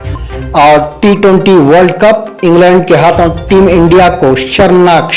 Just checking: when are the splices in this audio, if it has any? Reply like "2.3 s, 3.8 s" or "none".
none

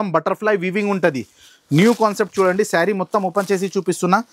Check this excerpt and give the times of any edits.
none

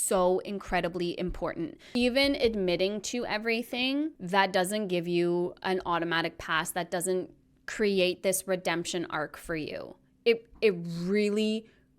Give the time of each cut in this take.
1.8 s, 4.2 s

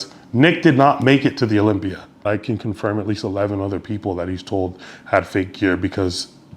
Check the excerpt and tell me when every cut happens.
2.2 s

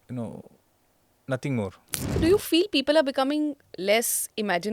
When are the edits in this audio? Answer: 2.2 s

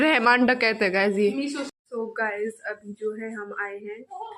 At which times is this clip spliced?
1.7 s

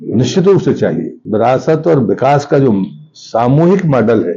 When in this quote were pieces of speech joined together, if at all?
1.2 s

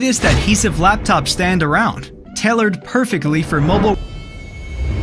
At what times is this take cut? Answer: 3.9 s

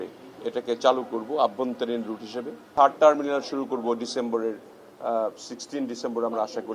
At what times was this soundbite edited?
2.7 s

